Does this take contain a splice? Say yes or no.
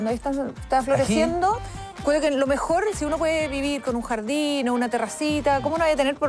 yes